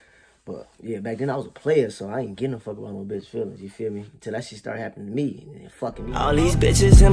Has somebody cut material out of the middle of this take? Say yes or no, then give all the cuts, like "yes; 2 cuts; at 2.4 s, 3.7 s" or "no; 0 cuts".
yes; 1 cut; at 6.1 s